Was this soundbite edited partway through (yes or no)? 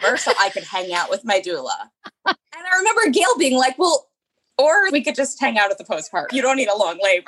yes